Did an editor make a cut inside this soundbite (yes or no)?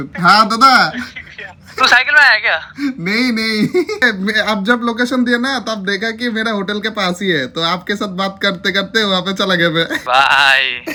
no